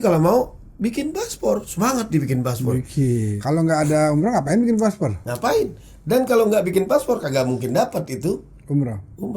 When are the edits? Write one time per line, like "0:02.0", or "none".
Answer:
0:03.3